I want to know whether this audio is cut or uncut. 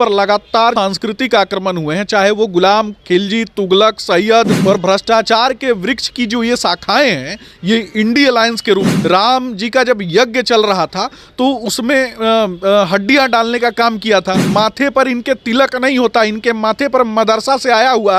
cut